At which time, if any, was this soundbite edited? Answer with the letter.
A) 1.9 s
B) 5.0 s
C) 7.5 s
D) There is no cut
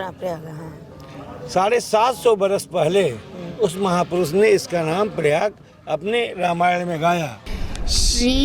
C